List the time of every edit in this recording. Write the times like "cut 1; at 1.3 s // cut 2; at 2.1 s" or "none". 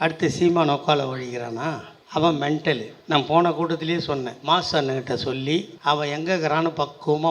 cut 1; at 1.9 s // cut 2; at 2.9 s // cut 3; at 4.3 s // cut 4; at 5.7 s

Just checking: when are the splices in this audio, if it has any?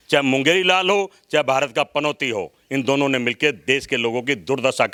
none

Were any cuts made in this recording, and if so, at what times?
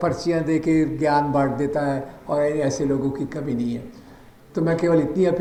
none

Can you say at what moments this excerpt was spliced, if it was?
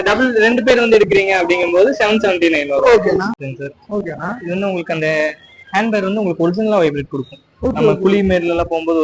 cut 1; at 3.4 s

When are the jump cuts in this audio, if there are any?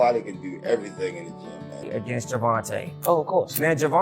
cut 1; at 1.8 s

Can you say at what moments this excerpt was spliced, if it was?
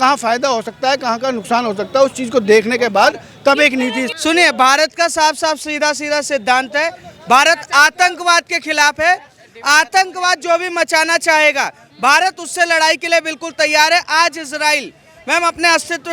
cut 1; at 4.1 s

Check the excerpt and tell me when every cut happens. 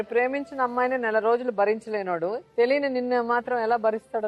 cut 1; at 2.4 s

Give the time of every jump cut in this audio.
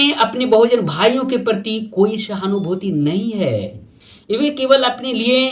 cut 1; at 4.4 s

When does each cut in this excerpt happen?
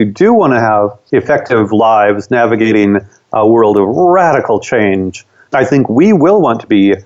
cut 1; at 1.0 s

